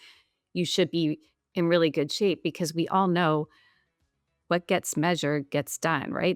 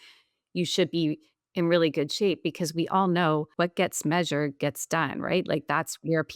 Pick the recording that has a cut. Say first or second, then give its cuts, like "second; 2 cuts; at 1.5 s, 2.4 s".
second; 1 cut; at 3.5 s